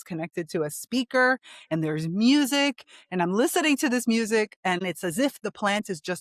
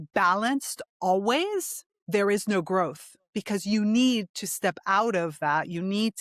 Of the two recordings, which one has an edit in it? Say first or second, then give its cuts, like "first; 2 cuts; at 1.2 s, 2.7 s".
first; 1 cut; at 4.8 s